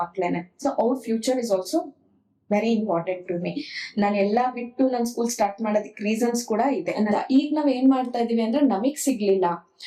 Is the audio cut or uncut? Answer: cut